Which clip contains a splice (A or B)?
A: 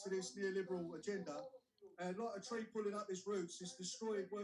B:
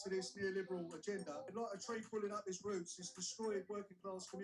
B